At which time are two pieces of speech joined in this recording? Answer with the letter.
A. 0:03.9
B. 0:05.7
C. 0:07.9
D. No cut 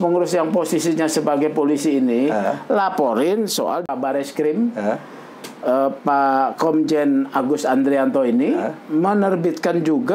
A